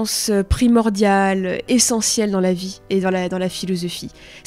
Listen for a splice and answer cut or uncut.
uncut